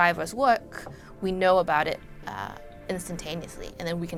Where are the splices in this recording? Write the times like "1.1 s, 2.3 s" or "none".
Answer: none